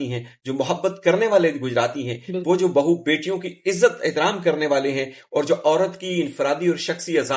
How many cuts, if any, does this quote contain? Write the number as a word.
zero